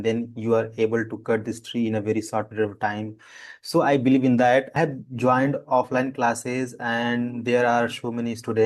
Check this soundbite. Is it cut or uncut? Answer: cut